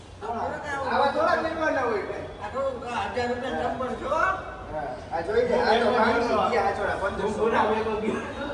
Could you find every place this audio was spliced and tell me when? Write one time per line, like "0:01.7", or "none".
none